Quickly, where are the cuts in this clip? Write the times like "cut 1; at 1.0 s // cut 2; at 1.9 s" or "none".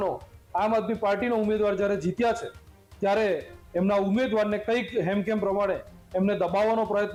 none